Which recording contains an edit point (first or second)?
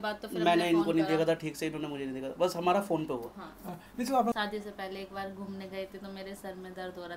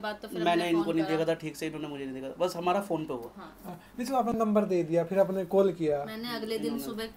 first